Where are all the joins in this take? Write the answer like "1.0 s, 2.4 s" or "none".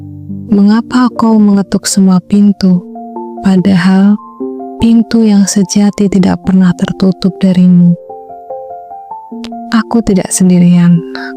8.2 s, 9.6 s